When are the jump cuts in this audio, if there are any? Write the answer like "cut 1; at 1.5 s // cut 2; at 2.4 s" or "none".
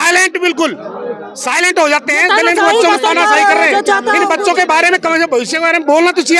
none